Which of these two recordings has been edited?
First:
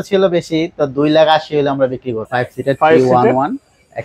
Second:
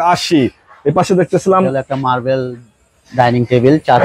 first; 1 cut; at 2.2 s

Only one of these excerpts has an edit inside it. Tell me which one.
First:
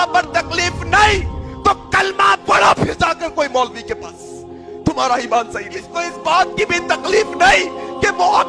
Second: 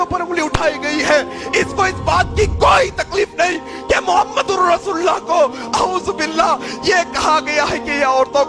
first; 1 cut; at 5.9 s

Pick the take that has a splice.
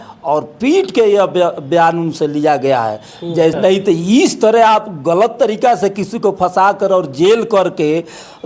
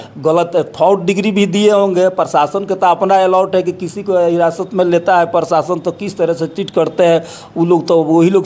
first; 1 cut; at 3.5 s

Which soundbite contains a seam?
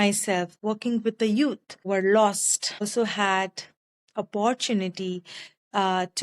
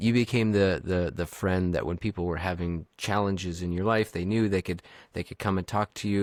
first; 2 cuts; at 1.8 s, 2.8 s

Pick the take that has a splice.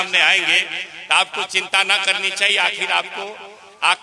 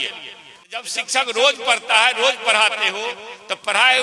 second; 1 cut; at 1.0 s

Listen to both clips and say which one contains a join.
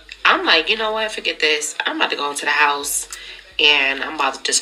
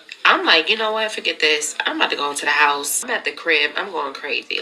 second; 1 cut; at 3.0 s

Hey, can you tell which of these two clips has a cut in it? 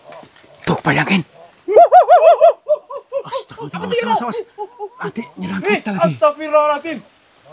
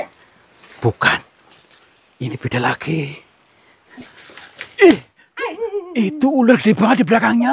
second; 1 cut; at 4.0 s

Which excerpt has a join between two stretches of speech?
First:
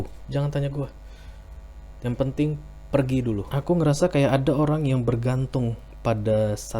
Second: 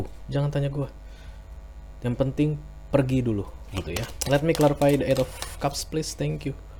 first; 1 cut; at 3.5 s

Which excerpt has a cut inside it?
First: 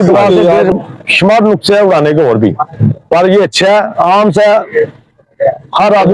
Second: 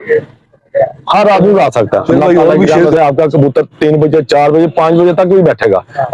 second; 1 cut; at 2.7 s

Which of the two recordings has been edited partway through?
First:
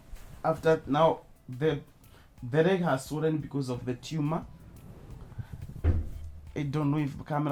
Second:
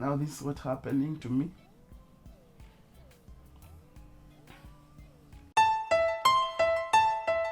second; 1 cut; at 5.5 s

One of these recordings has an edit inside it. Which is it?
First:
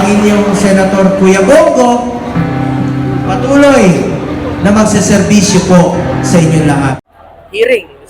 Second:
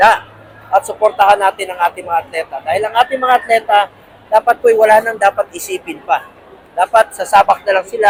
first; 1 cut; at 7.0 s

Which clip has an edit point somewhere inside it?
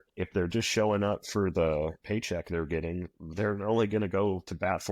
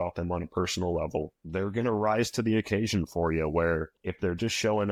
first; 2 cuts; at 2.0 s, 3.2 s

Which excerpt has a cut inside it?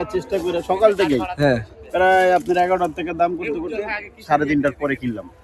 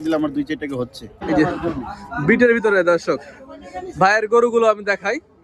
second; 1 cut; at 1.2 s

